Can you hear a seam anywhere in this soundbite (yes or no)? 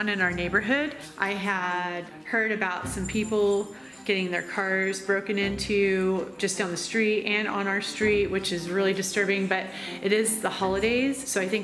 no